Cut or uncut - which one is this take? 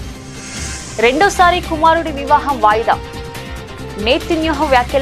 uncut